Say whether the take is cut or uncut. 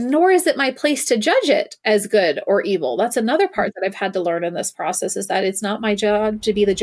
uncut